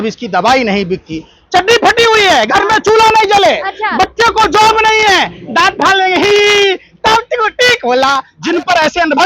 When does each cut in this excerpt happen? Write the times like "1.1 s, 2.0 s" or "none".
8.3 s